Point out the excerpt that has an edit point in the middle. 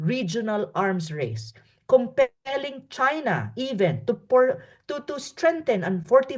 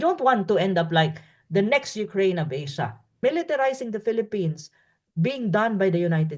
second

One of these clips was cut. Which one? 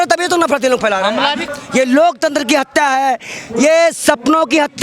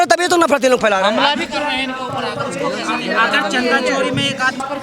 first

